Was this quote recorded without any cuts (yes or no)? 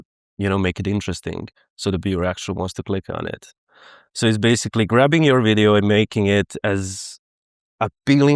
yes